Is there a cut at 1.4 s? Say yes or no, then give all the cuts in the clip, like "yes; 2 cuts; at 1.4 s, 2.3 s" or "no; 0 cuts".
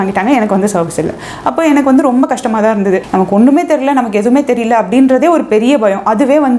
no; 1 cut; at 3.1 s